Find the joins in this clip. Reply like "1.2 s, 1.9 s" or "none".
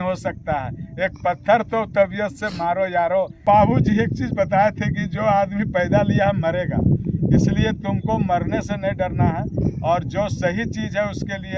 3.4 s